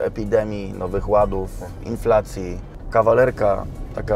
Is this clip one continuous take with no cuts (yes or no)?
no